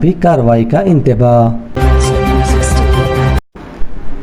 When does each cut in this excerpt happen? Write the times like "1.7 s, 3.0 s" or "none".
1.7 s